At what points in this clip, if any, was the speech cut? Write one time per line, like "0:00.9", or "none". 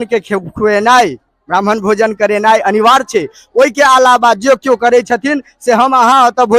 none